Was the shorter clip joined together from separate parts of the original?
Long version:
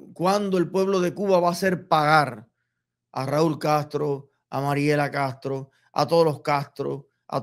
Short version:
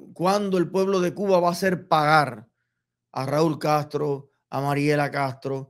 no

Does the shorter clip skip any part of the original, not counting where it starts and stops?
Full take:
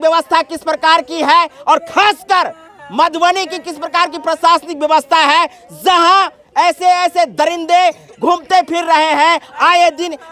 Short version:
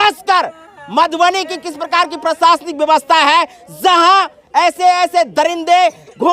no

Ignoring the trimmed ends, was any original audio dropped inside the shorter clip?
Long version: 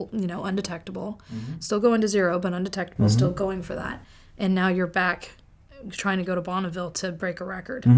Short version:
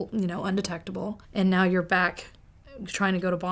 yes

